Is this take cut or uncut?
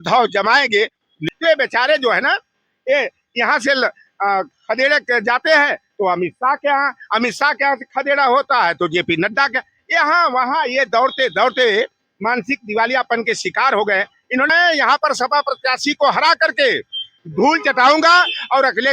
cut